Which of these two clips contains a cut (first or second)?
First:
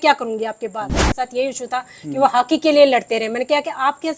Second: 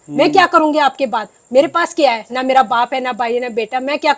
first